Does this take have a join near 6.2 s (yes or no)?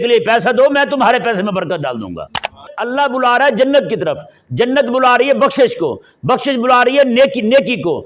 no